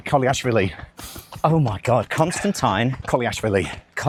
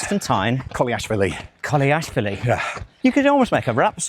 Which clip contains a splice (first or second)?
second